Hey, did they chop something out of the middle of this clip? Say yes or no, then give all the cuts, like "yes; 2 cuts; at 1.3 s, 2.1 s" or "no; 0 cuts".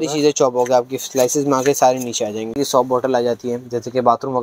yes; 1 cut; at 2.5 s